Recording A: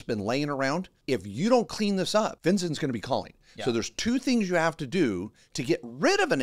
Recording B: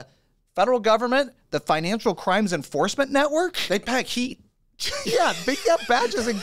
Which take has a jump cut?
A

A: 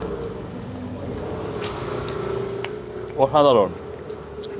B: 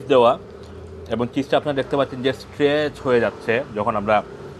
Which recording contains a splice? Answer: A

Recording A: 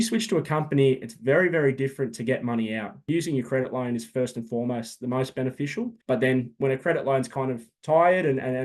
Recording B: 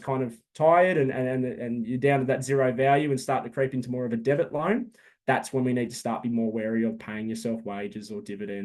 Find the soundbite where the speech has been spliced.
A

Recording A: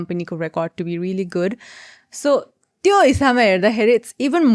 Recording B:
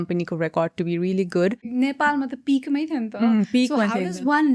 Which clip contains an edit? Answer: B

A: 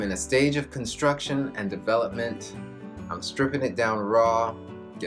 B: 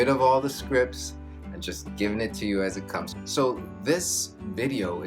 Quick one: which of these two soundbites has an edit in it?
B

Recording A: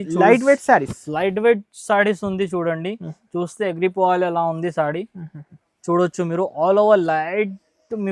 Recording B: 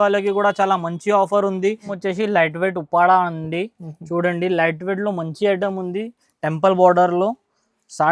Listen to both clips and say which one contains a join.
B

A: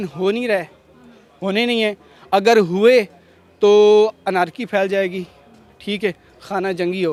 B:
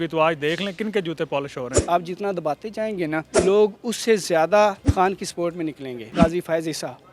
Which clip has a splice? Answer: B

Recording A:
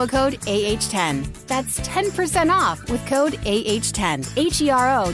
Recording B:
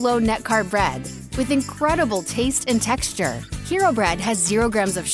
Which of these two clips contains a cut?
A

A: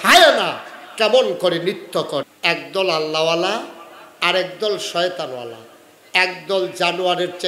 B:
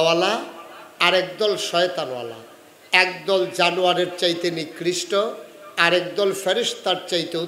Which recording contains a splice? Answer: A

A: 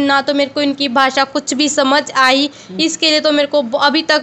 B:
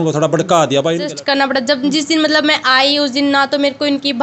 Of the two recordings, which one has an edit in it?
B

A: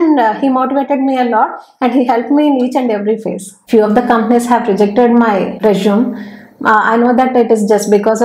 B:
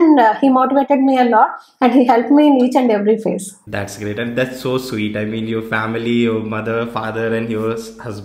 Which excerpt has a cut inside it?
A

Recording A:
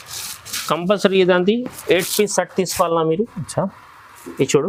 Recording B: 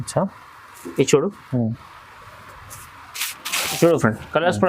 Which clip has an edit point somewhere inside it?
B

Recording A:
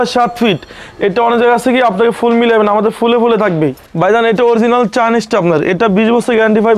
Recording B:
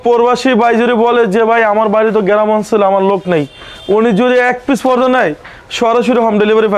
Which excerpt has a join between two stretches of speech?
A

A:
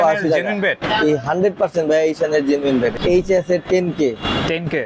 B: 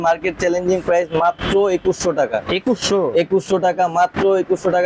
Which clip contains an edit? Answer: A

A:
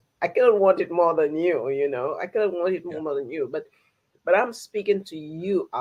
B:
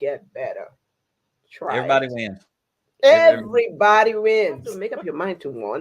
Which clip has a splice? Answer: B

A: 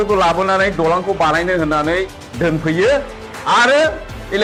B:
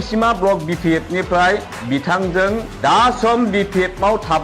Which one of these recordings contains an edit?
B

